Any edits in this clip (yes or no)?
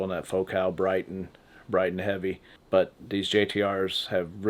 yes